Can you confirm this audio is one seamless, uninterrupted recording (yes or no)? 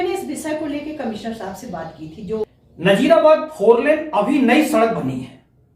no